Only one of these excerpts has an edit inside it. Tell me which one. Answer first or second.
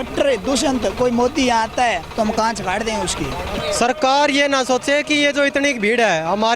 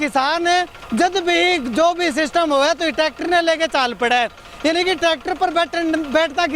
first